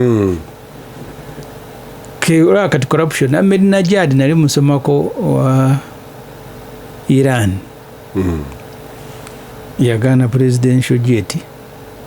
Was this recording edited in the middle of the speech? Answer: no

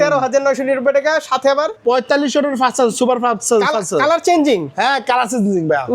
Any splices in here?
yes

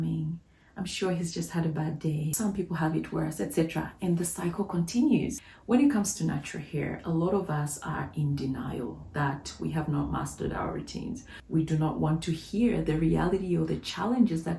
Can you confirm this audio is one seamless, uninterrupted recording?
no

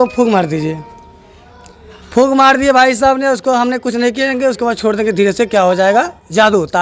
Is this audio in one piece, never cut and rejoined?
yes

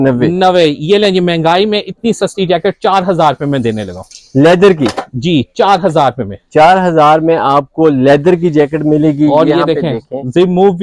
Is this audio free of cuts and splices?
yes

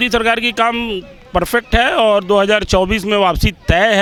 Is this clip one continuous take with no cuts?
yes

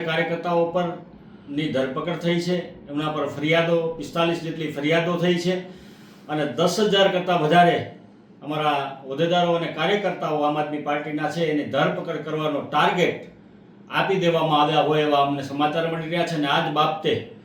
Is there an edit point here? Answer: no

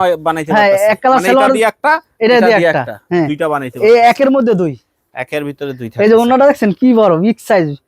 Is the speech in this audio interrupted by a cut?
no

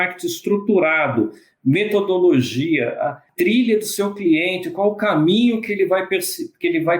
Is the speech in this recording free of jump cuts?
no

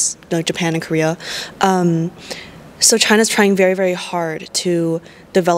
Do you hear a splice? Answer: no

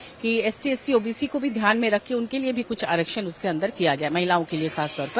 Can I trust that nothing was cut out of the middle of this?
yes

